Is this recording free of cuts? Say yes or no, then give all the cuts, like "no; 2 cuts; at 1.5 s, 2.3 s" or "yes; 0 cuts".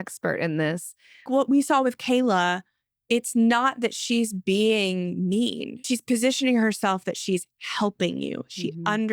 no; 2 cuts; at 1.3 s, 5.9 s